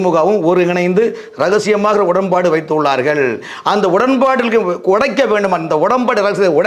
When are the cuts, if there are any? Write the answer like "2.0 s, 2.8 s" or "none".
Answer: none